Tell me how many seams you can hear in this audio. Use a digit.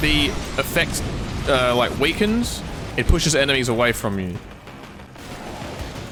0